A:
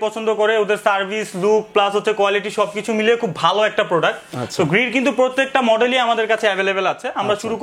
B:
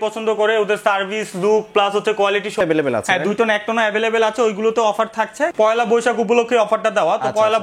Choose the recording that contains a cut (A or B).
B